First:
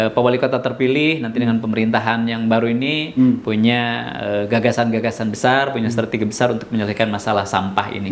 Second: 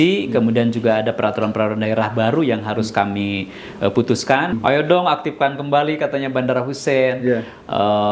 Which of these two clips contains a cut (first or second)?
second